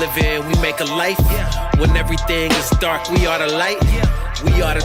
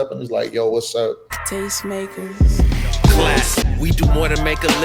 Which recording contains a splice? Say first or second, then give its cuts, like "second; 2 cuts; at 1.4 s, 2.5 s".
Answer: second; 1 cut; at 1.3 s